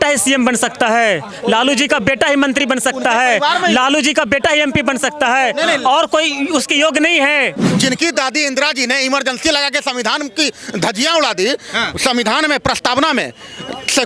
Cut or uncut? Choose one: cut